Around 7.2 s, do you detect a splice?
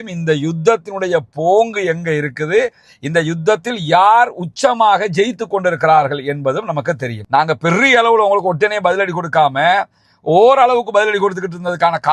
yes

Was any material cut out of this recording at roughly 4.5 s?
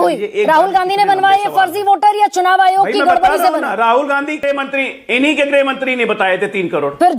yes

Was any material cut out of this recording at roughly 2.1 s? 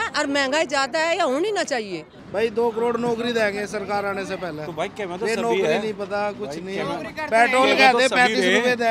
yes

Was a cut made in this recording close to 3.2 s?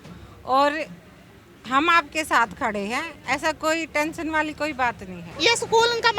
no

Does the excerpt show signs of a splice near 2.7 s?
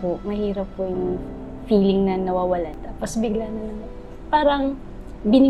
yes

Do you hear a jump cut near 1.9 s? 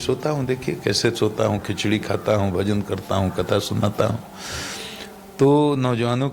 no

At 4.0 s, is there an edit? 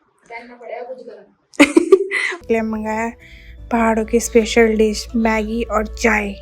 no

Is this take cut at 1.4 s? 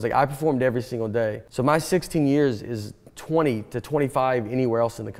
yes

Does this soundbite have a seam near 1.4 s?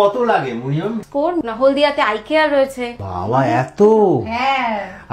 yes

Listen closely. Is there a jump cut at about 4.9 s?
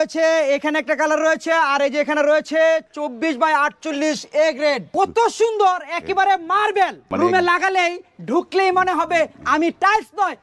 yes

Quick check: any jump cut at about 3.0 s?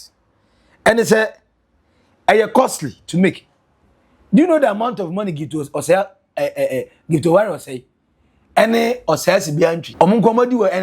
no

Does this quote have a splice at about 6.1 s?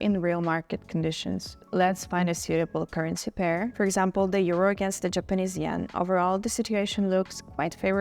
no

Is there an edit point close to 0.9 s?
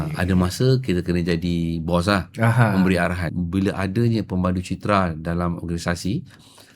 no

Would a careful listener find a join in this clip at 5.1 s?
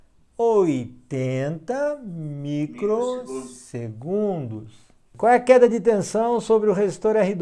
yes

